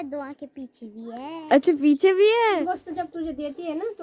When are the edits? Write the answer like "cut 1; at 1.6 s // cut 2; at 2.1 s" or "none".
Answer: cut 1; at 2.6 s